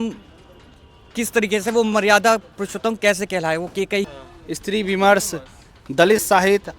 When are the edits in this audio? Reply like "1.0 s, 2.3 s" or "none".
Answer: 4.2 s